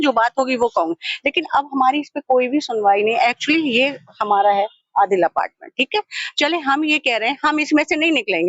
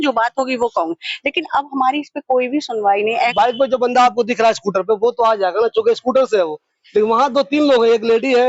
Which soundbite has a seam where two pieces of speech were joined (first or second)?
second